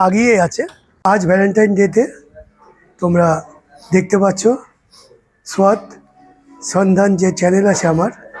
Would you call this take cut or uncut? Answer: cut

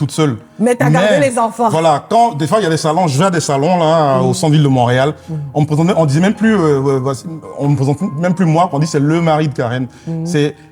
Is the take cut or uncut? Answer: uncut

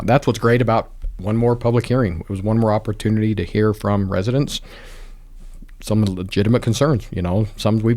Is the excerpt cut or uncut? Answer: uncut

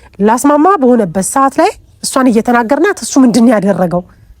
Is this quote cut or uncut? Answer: uncut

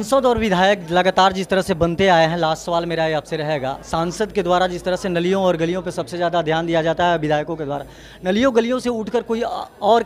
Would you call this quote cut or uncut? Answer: uncut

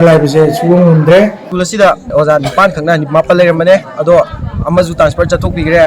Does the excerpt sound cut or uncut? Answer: cut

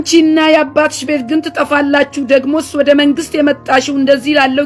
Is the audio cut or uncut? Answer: uncut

